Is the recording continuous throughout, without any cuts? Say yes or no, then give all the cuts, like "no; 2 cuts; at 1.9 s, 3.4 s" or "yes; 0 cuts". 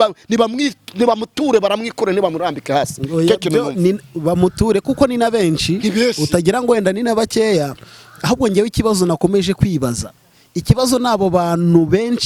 yes; 0 cuts